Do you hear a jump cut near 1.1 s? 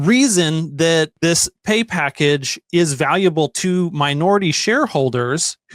yes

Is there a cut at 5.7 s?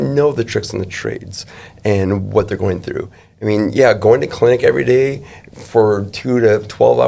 no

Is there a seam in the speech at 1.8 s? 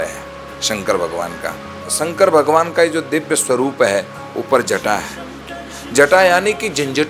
yes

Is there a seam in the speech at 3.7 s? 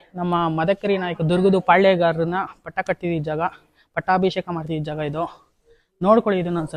no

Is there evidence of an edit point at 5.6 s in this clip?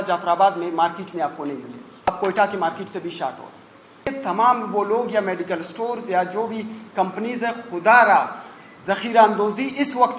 no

